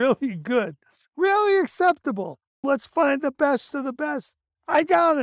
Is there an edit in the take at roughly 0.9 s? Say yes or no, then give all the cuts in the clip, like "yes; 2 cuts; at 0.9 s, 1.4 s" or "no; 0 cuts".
no; 1 cut; at 2.6 s